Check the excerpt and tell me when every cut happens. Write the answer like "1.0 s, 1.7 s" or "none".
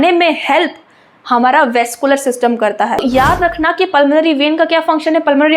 3.0 s